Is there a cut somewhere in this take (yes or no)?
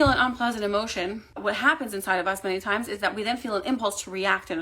yes